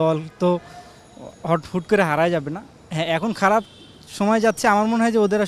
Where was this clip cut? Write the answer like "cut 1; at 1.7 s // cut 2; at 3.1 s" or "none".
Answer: none